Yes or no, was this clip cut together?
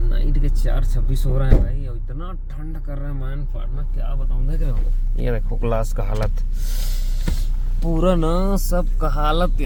no